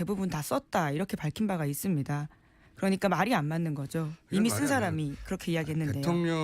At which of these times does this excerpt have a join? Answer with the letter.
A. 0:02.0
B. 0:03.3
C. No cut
A